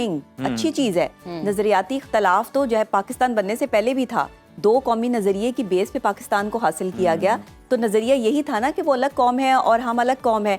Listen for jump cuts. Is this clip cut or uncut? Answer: uncut